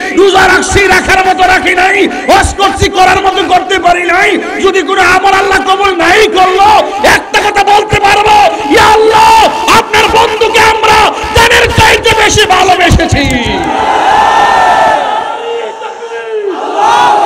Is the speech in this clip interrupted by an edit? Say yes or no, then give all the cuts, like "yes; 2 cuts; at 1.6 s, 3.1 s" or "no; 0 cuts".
no; 0 cuts